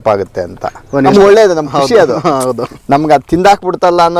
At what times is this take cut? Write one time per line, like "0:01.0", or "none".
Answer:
0:01.1